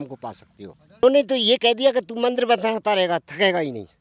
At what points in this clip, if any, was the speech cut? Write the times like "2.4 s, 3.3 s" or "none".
1.0 s